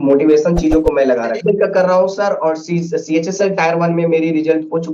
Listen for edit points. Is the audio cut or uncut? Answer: cut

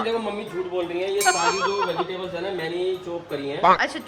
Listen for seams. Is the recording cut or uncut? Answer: uncut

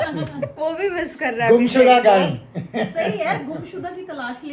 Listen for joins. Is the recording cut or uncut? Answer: uncut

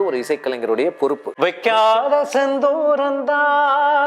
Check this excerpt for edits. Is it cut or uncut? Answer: cut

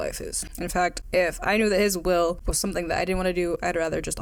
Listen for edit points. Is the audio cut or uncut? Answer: uncut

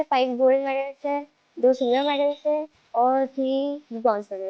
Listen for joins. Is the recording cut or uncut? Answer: uncut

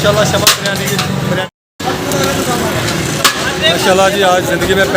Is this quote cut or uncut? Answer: cut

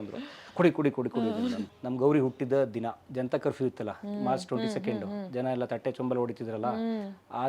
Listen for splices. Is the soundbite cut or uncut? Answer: cut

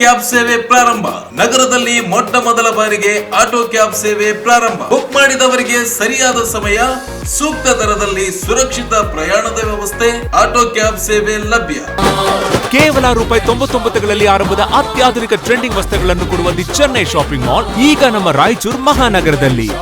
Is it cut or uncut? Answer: cut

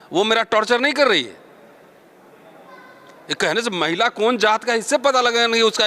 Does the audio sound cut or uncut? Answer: uncut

